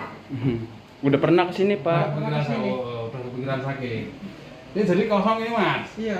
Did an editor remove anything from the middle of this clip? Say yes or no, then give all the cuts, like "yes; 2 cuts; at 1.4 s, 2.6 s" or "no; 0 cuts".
no; 0 cuts